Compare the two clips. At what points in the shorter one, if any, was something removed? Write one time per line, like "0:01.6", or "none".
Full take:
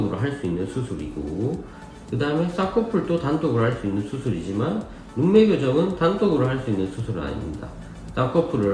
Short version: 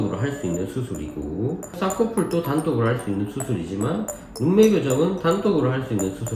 0:01.8